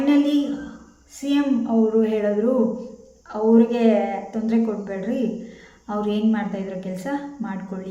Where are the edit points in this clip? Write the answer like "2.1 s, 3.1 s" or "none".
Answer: none